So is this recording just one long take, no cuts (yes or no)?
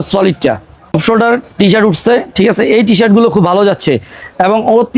no